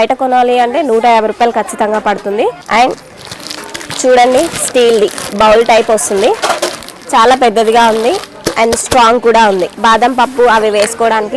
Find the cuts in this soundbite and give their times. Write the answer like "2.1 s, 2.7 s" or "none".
2.6 s, 9.7 s